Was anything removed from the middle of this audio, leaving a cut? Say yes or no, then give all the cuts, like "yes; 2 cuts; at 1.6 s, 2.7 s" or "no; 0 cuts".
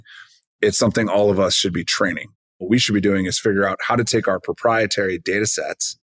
yes; 1 cut; at 2.5 s